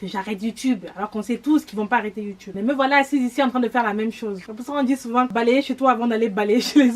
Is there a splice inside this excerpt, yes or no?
yes